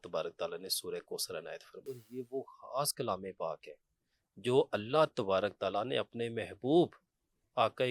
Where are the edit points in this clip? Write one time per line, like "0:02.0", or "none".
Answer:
0:02.0